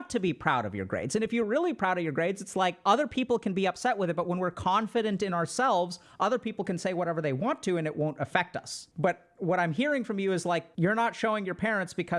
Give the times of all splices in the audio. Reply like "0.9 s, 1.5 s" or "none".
2.8 s, 8.8 s, 10.7 s